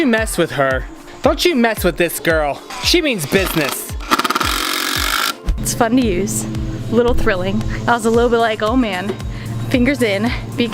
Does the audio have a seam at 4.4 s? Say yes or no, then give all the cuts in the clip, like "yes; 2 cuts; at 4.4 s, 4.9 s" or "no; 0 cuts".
no; 2 cuts; at 2.7 s, 5.6 s